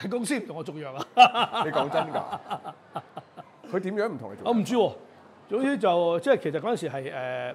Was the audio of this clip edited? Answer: no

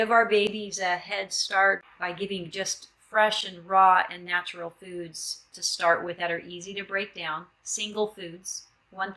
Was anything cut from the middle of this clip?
yes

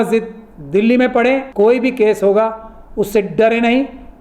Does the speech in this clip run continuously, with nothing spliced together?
no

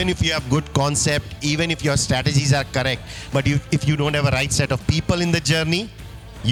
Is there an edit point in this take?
no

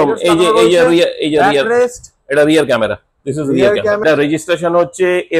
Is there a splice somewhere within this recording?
yes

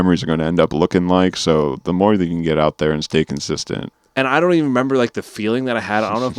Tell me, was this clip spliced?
yes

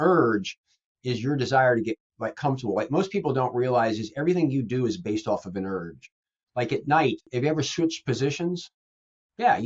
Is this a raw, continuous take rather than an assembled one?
no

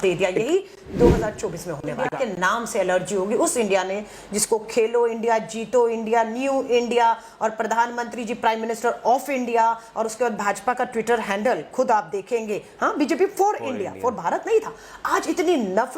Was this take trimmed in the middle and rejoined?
yes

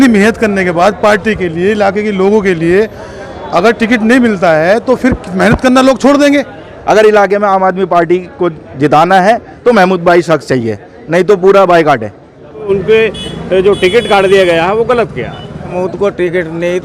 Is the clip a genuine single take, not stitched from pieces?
no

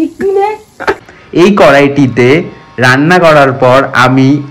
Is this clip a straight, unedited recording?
no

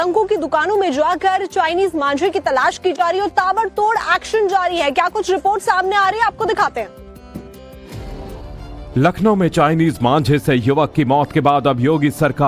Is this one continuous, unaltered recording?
yes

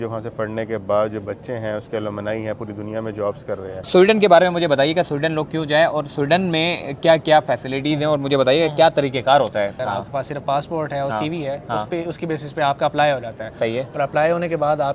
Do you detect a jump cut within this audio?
yes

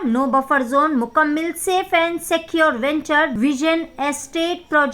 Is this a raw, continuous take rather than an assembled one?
no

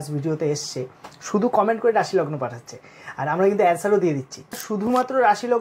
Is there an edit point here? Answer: yes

